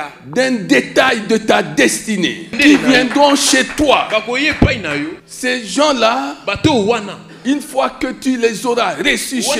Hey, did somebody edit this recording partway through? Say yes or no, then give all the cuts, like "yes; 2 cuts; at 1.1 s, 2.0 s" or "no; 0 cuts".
yes; 2 cuts; at 2.5 s, 5.2 s